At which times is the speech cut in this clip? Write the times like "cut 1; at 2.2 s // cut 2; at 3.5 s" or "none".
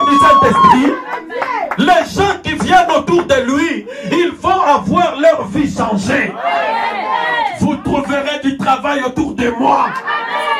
none